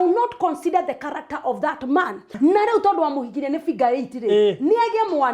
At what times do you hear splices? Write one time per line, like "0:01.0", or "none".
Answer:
0:02.3